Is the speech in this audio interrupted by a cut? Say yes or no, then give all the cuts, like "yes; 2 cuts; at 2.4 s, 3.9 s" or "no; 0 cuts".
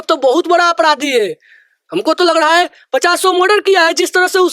no; 0 cuts